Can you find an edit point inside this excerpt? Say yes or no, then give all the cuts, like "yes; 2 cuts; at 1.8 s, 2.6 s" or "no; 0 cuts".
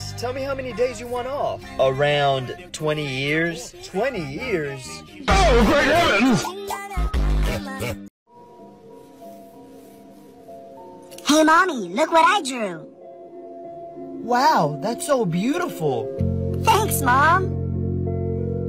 yes; 1 cut; at 8.3 s